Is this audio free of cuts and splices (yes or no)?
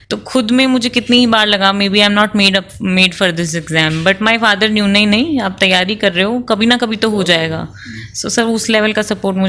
yes